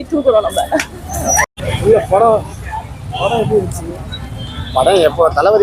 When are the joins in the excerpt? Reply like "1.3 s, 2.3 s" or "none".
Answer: 1.5 s